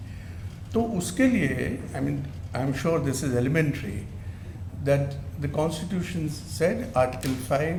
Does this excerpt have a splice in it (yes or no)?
no